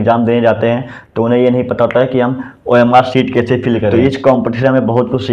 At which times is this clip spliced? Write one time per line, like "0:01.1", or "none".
0:03.9